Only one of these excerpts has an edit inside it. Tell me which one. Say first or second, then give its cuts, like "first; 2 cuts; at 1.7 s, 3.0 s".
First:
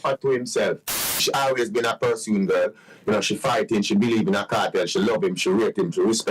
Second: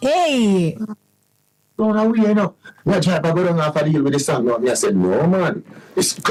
first; 1 cut; at 1.1 s